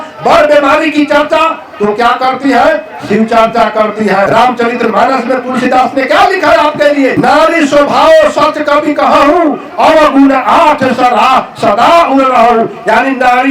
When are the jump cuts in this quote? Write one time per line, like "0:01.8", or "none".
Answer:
0:04.3
0:07.1